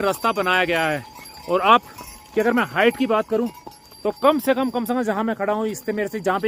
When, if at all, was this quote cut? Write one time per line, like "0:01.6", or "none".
none